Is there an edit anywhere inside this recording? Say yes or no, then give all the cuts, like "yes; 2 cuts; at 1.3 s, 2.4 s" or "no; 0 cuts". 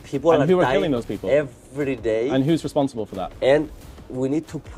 no; 0 cuts